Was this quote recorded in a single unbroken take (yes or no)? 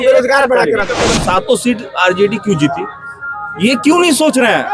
no